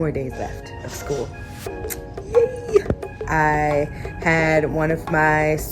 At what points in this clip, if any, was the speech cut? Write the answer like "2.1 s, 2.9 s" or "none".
3.2 s